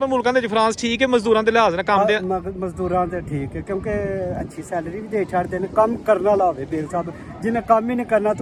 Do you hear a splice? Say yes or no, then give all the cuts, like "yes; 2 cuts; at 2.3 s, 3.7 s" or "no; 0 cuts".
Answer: no; 0 cuts